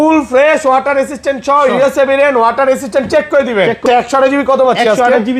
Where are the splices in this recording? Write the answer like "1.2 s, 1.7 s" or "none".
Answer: 3.8 s